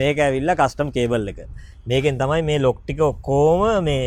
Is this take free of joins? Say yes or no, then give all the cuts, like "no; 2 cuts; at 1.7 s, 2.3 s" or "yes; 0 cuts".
yes; 0 cuts